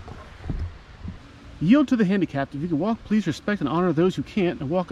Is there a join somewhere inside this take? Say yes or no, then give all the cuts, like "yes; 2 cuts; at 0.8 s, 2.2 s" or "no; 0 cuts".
yes; 1 cut; at 1.2 s